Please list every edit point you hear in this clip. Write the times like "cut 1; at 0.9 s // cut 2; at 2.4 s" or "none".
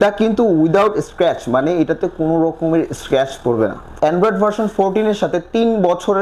cut 1; at 3.9 s